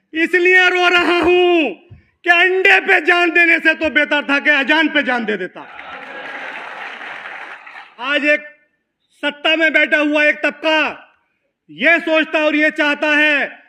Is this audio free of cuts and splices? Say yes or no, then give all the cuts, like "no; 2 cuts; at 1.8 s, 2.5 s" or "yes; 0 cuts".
no; 1 cut; at 8.1 s